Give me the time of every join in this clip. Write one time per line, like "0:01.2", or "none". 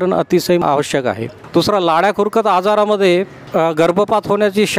0:01.4
0:03.4